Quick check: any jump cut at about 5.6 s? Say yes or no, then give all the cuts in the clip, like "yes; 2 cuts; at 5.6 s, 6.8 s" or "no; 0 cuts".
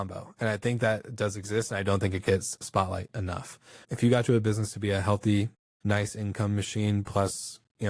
yes; 3 cuts; at 2.6 s, 3.8 s, 5.6 s